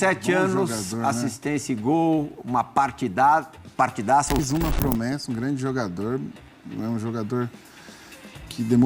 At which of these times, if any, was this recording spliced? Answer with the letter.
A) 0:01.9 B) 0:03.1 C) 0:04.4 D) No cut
C